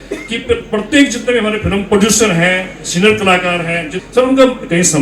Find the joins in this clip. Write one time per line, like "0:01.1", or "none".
0:03.9